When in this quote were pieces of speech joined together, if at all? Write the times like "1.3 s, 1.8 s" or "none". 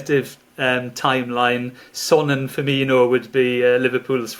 none